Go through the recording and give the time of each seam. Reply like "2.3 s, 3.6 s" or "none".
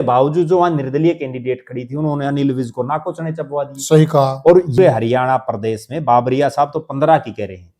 4.7 s